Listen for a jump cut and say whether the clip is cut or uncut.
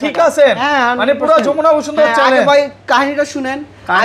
uncut